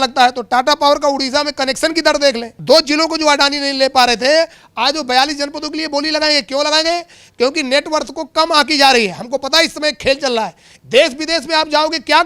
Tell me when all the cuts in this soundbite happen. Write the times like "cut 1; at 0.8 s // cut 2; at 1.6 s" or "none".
cut 1; at 2.5 s // cut 2; at 10.6 s